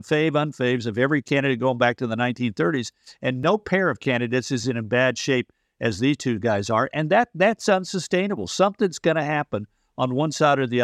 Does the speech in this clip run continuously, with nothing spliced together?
no; 2 cuts; at 3.4 s, 4.6 s

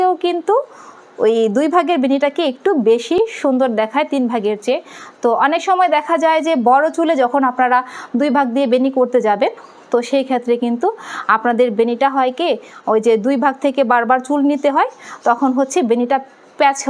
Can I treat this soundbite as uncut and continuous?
yes; 0 cuts

